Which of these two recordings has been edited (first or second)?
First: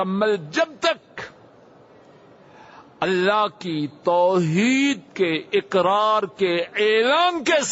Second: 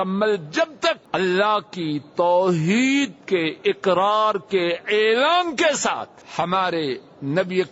second